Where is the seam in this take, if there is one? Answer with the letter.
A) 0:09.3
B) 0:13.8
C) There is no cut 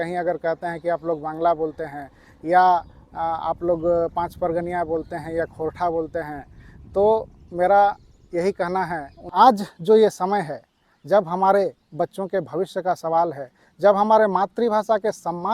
A